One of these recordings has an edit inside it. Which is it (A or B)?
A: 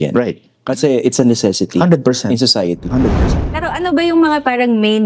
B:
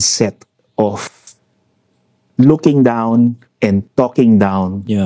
A